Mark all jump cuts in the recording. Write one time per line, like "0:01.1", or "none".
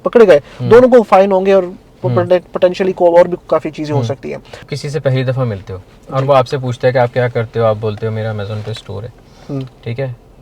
0:04.7